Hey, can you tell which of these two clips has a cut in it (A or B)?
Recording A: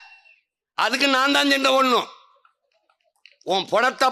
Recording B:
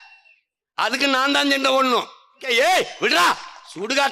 B